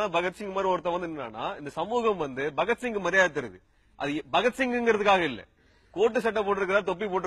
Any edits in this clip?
no; 0 cuts

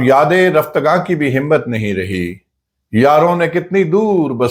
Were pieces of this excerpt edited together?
no; 0 cuts

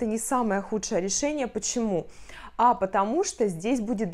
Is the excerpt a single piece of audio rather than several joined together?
yes; 0 cuts

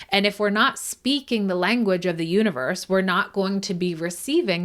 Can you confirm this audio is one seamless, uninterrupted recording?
yes; 0 cuts

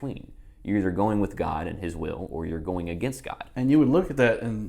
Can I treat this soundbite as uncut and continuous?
no; 1 cut; at 3.4 s

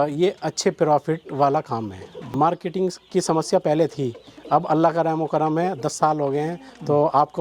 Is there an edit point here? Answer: yes; 1 cut; at 2.3 s

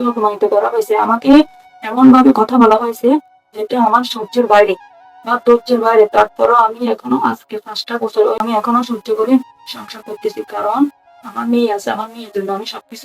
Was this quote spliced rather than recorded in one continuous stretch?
yes; 1 cut; at 8.4 s

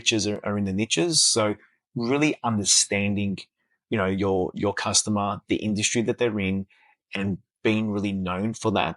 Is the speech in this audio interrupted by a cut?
no; 0 cuts

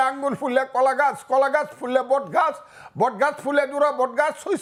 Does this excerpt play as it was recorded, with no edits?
yes; 0 cuts

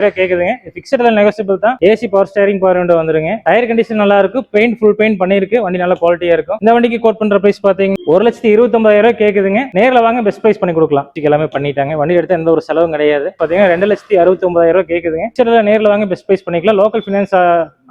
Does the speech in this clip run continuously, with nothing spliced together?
no; 4 cuts; at 1.8 s, 3.3 s, 11.1 s, 13.3 s

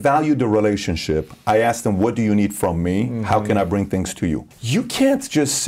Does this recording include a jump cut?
yes; 1 cut; at 4.5 s

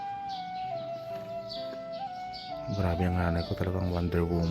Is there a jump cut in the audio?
yes; 1 cut; at 2.7 s

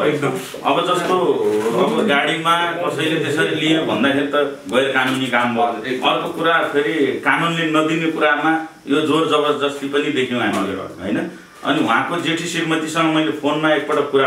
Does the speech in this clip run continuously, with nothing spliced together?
yes; 0 cuts

